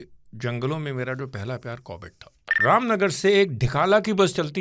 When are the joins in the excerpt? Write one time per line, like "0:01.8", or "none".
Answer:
0:02.5